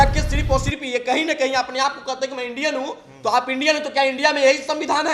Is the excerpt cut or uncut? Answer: uncut